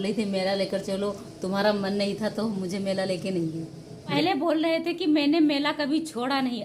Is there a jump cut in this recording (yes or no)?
yes